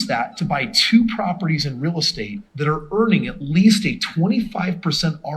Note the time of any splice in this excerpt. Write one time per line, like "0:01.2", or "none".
0:02.4